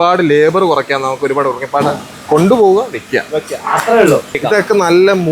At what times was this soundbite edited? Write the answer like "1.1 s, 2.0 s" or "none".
4.4 s